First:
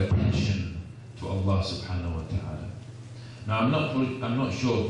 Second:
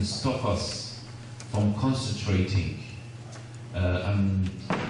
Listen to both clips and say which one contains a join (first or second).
second